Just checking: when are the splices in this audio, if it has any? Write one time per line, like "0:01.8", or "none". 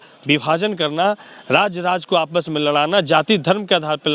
none